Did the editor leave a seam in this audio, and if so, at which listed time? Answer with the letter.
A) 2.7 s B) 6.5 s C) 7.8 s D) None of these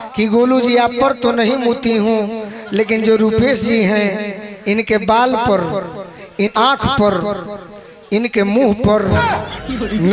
B